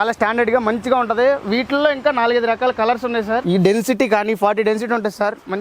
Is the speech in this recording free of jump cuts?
no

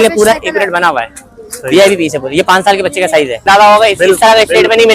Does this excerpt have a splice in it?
yes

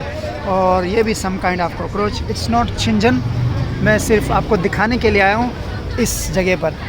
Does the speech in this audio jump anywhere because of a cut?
yes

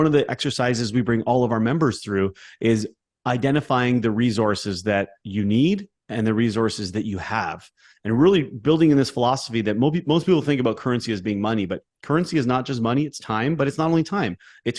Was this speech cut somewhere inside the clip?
no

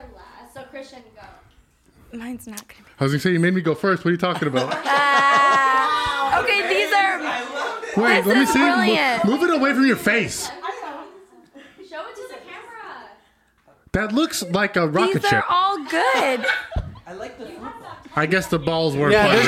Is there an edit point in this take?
no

